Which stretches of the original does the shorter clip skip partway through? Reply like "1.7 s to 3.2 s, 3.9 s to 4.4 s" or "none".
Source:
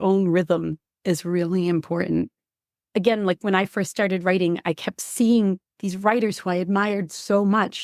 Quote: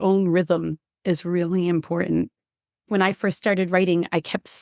2.9 s to 3.4 s